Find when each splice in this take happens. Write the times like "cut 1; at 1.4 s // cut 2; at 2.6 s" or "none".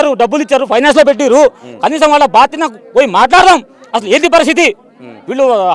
none